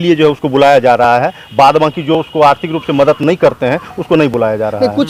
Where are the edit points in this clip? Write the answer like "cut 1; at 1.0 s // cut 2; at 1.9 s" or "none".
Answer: none